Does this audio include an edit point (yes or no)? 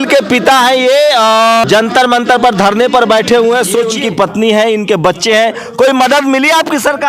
yes